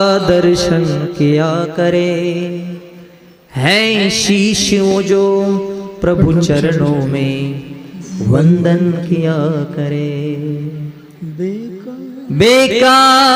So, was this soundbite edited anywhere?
no; 0 cuts

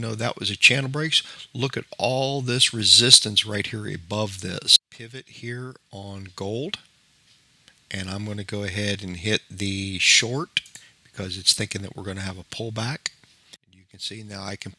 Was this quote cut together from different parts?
yes; 2 cuts; at 4.7 s, 13.6 s

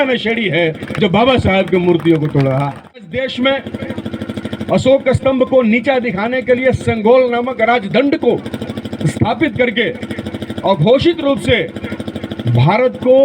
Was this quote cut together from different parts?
yes; 1 cut; at 3.1 s

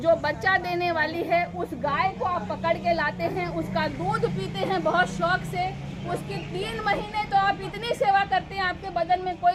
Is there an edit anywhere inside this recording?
no; 0 cuts

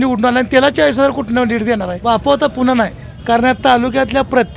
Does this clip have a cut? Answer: yes; 2 cuts; at 2.0 s, 3.1 s

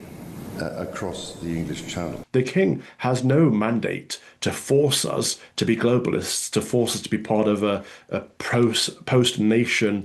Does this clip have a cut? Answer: yes; 1 cut; at 2.2 s

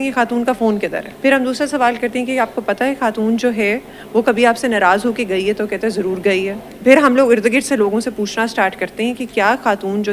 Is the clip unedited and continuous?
no; 2 cuts; at 1.1 s, 6.7 s

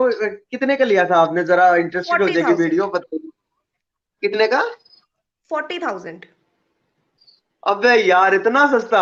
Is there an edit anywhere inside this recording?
no; 0 cuts

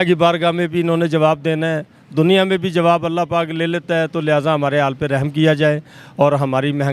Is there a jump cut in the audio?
no; 0 cuts

